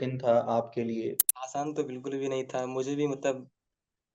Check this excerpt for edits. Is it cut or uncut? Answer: cut